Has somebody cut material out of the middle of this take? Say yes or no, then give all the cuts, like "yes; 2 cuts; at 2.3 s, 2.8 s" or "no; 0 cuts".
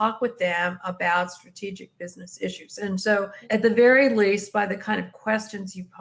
yes; 1 cut; at 3.4 s